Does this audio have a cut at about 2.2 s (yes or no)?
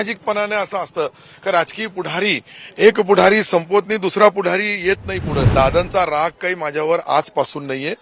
no